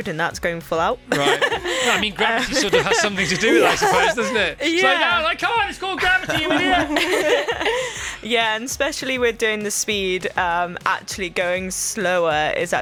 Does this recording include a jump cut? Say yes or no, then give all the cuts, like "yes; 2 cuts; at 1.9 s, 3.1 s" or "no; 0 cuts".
no; 0 cuts